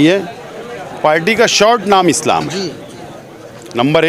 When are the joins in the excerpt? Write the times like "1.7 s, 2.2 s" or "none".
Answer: none